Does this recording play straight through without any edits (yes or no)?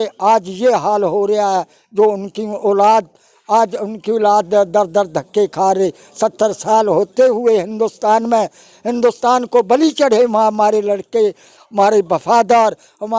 yes